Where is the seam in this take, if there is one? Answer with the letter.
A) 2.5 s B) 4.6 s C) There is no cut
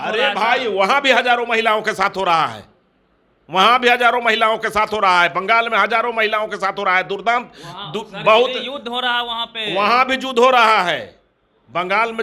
C